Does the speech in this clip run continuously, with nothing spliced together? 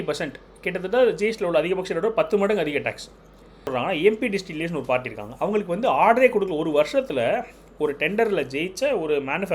no; 1 cut; at 3.7 s

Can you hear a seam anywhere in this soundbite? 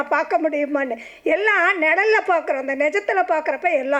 no; 0 cuts

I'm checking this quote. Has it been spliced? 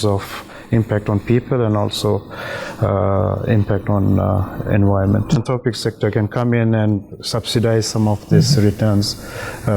yes; 1 cut; at 5.4 s

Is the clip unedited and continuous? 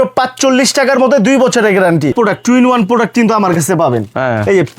no; 1 cut; at 2.1 s

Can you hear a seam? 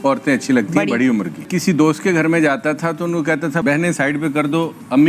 no; 0 cuts

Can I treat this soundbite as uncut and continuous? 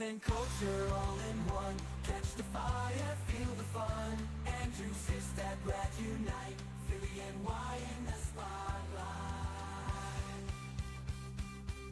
yes; 0 cuts

